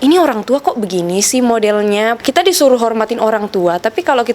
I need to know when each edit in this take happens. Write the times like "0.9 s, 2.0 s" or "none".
2.2 s